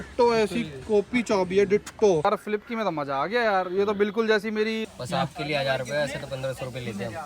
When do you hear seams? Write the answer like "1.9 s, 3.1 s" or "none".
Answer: 2.2 s, 4.9 s